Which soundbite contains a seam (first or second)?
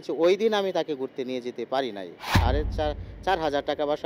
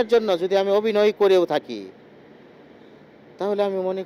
first